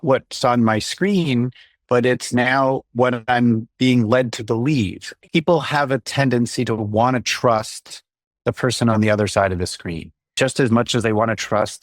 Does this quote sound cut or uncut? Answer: cut